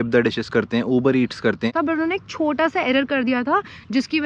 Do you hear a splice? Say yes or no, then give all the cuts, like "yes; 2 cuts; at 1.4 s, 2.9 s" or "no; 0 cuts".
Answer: yes; 1 cut; at 1.7 s